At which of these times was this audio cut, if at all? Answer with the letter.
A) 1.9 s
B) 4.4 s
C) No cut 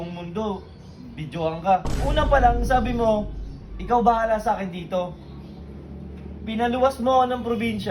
A